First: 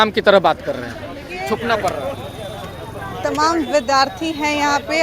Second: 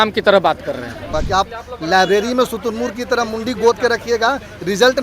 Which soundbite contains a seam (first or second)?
second